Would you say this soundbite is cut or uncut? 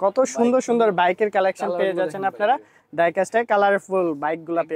uncut